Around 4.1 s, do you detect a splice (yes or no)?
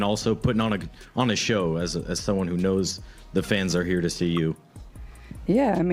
yes